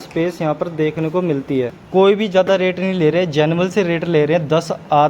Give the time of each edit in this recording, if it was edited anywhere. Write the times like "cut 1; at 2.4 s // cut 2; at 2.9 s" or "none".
cut 1; at 1.8 s